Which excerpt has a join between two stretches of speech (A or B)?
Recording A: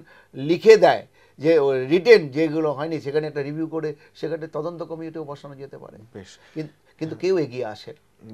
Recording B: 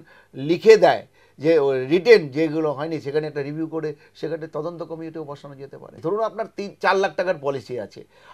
B